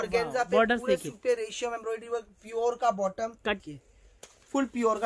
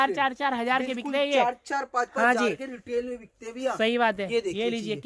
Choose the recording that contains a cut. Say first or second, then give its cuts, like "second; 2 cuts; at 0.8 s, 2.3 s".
first; 1 cut; at 3.6 s